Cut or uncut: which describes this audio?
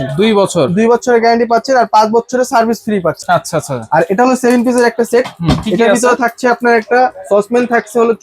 cut